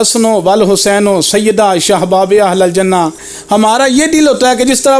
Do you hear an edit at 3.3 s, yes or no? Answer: yes